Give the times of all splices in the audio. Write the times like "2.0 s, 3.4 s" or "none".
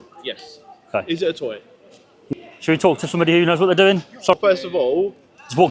2.2 s, 4.3 s